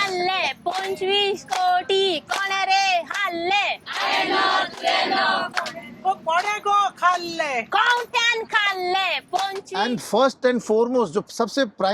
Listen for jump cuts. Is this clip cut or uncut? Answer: cut